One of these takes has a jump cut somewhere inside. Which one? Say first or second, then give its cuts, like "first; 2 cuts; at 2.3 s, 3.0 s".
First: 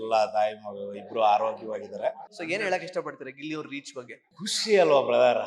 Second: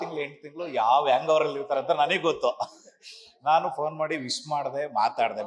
first; 2 cuts; at 2.3 s, 4.2 s